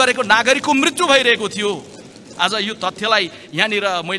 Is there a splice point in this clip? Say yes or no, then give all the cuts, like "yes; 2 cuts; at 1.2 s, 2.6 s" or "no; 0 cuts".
no; 0 cuts